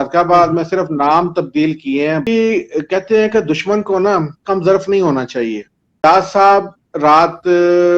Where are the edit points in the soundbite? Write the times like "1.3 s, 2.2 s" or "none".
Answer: 2.3 s, 6.0 s